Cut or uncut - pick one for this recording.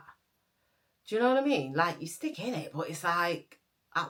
uncut